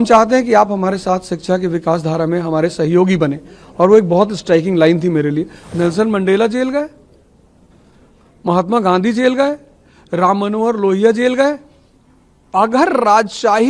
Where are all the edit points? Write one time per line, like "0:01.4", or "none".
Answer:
0:05.6